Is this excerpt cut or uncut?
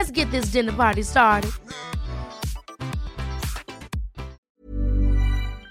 cut